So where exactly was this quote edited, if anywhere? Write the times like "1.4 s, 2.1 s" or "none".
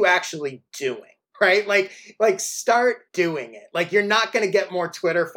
1.2 s, 3.0 s